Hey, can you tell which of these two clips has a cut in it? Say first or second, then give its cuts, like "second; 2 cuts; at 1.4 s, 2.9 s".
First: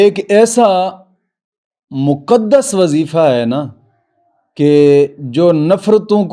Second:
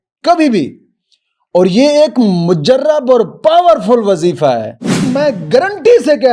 second; 1 cut; at 5.0 s